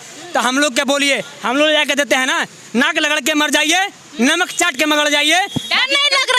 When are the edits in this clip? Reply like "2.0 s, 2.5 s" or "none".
none